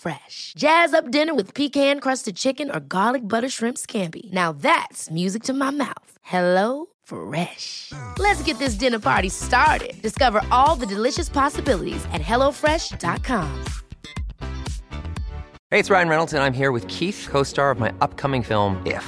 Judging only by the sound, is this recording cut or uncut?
cut